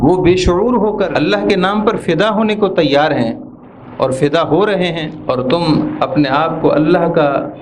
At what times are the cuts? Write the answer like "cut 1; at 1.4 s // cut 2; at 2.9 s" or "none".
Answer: cut 1; at 1.1 s // cut 2; at 5.1 s

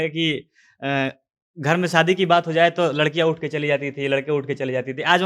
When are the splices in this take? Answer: none

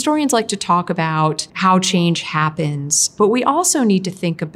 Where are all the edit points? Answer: cut 1; at 1.5 s

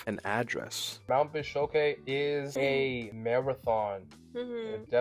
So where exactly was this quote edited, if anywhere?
cut 1; at 1.0 s // cut 2; at 2.9 s

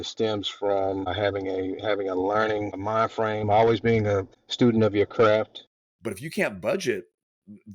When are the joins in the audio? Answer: cut 1; at 5.7 s

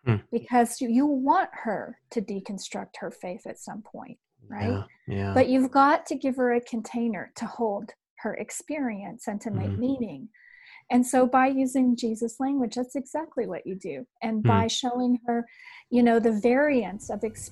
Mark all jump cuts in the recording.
none

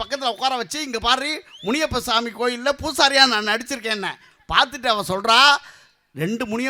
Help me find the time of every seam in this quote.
none

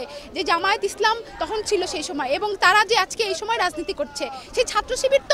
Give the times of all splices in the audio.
cut 1; at 4.4 s

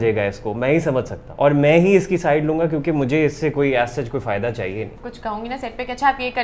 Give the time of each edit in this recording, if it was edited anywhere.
cut 1; at 1.2 s // cut 2; at 5.0 s

